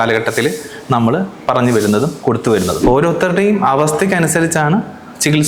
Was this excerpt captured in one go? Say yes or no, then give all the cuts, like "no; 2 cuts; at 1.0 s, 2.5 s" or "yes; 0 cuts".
no; 1 cut; at 2.8 s